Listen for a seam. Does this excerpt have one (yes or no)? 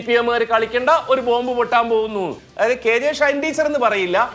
yes